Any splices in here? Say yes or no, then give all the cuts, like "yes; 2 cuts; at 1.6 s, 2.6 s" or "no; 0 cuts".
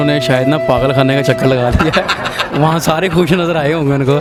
no; 0 cuts